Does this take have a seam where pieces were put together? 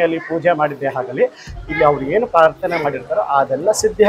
no; 0 cuts

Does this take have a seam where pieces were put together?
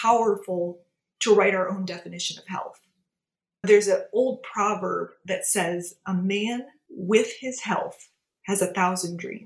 no; 0 cuts

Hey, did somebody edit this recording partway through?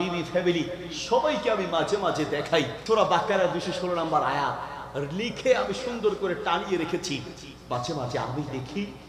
yes; 1 cut; at 2.8 s

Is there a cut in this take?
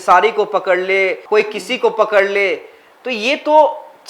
no; 0 cuts

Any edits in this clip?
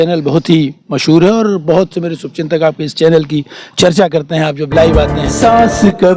yes; 1 cut; at 5.2 s

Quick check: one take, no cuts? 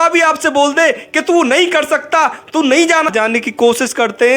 no; 1 cut; at 3.1 s

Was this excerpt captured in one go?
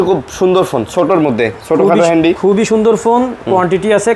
yes; 0 cuts

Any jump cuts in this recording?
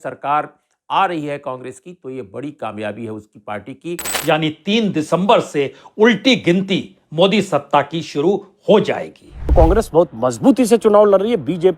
yes; 2 cuts; at 4.1 s, 9.5 s

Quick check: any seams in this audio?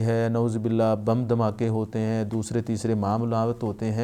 no; 0 cuts

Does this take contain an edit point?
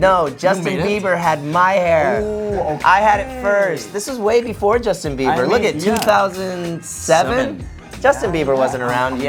no; 0 cuts

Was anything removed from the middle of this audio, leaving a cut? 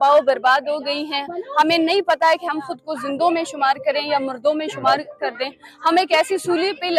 no; 0 cuts

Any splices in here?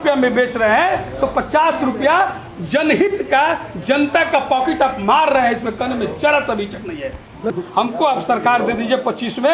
yes; 1 cut; at 7.5 s

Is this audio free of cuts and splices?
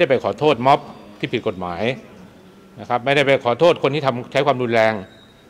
yes; 0 cuts

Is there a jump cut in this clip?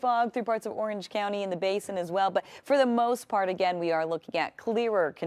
no; 0 cuts

